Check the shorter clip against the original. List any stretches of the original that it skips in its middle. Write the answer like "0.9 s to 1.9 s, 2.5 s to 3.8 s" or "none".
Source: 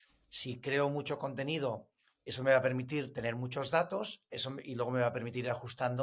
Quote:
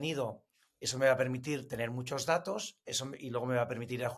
none